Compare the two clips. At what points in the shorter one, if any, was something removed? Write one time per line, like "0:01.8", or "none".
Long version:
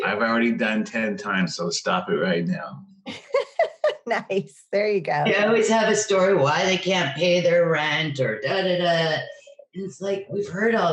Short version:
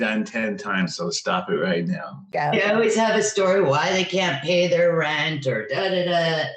0:02.3